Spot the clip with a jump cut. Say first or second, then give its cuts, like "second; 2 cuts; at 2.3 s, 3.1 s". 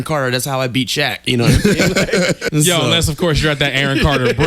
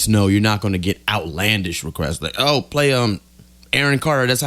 first; 1 cut; at 2.4 s